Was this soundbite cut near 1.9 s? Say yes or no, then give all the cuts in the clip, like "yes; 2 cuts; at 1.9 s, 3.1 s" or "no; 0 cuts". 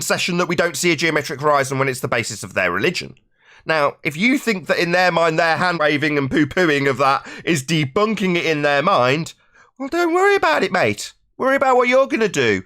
no; 1 cut; at 5.8 s